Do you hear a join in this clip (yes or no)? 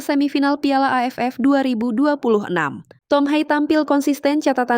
yes